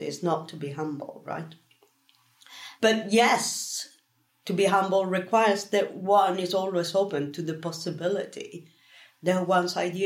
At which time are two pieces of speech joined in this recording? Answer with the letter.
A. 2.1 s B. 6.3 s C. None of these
C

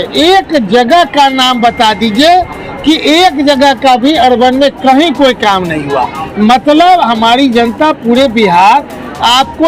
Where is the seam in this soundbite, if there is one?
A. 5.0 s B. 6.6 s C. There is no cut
C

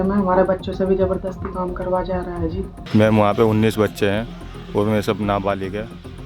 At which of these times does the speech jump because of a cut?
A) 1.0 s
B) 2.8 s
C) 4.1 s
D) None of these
B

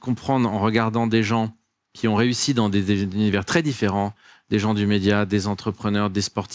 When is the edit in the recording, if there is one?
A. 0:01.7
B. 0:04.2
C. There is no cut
C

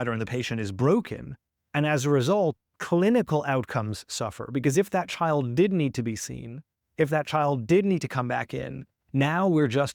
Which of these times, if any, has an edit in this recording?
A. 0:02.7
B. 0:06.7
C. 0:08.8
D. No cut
D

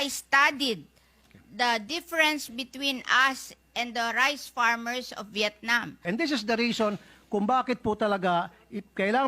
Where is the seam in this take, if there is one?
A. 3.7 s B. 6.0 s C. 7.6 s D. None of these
B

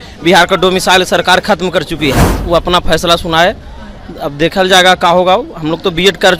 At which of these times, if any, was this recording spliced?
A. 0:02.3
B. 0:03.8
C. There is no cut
A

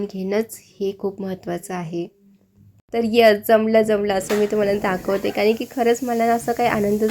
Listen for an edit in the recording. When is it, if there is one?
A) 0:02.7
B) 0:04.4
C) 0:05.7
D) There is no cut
A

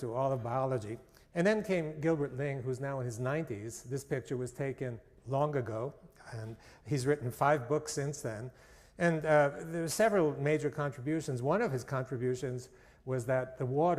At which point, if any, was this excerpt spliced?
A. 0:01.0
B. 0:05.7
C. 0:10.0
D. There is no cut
B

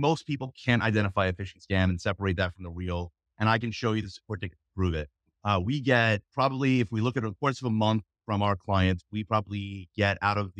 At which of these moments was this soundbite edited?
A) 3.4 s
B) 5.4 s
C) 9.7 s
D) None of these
D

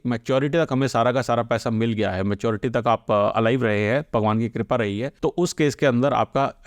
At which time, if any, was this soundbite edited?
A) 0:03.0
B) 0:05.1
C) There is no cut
B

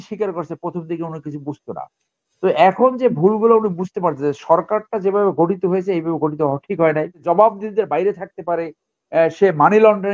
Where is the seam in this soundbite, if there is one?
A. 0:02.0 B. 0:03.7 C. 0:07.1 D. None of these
C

